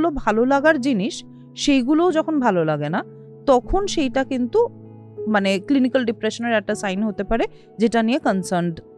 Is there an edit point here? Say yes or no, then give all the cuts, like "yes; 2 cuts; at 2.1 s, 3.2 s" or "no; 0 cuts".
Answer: no; 0 cuts